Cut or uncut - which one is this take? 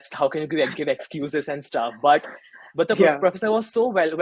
uncut